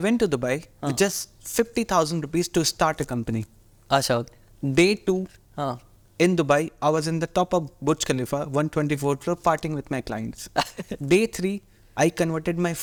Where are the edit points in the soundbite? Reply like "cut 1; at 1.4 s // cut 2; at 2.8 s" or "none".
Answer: none